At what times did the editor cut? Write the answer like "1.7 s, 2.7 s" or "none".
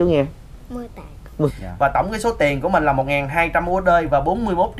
1.5 s

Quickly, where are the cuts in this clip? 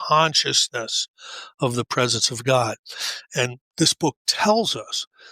3.6 s

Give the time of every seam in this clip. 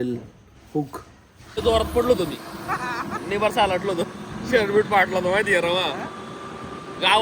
1.6 s

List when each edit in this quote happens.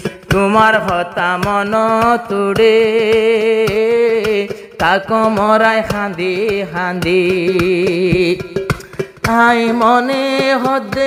none

